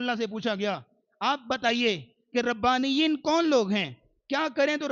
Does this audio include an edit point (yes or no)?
no